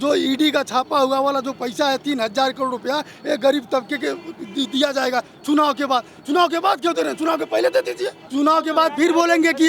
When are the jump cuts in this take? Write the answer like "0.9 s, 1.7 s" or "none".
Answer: 8.2 s